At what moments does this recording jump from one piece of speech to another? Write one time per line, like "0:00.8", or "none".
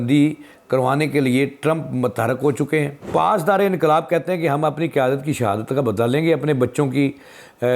0:03.0